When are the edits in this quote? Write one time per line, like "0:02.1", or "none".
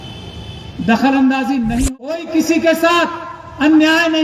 0:02.2

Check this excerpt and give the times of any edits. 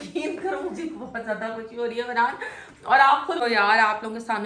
0:03.4

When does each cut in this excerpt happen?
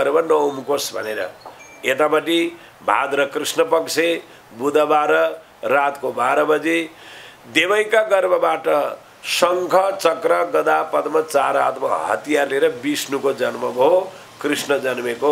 none

